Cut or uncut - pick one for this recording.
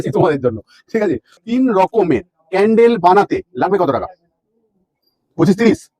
cut